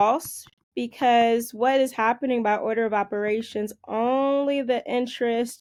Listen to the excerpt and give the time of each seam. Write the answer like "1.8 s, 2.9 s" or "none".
none